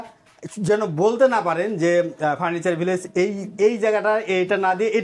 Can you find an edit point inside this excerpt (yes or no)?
no